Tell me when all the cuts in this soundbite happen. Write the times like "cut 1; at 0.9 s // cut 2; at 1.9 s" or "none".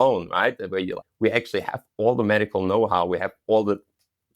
cut 1; at 1.0 s